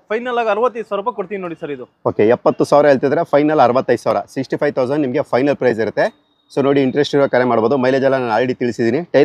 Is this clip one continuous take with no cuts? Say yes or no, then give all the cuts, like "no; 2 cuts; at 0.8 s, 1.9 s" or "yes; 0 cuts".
yes; 0 cuts